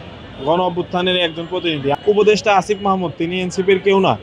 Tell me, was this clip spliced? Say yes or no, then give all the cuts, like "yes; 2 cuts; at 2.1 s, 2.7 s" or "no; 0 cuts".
yes; 1 cut; at 1.9 s